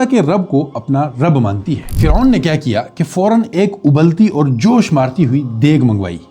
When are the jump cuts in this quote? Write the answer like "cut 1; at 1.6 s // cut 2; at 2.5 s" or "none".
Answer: cut 1; at 1.9 s